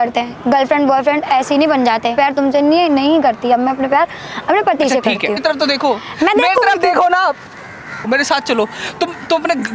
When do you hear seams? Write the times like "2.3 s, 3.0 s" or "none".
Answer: 2.1 s, 5.4 s, 8.1 s